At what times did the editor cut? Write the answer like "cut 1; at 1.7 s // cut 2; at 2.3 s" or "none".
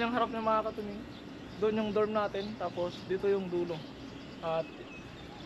none